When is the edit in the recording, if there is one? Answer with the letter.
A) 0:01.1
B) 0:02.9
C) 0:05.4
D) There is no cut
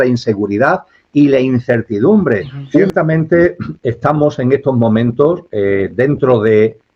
B